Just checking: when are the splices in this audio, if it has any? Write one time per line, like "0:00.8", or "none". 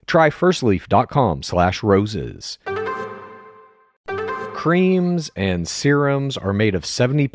0:04.0